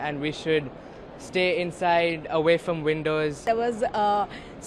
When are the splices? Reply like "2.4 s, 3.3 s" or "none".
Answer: 3.5 s